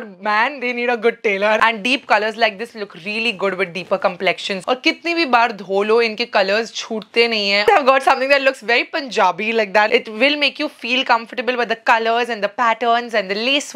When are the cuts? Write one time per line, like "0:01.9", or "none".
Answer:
0:01.6
0:04.6
0:07.6
0:09.9